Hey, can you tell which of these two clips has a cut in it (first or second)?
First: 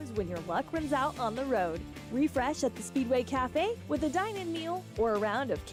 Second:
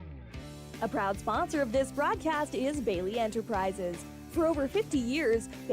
second